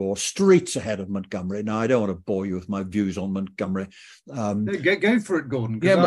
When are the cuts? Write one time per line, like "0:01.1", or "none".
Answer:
none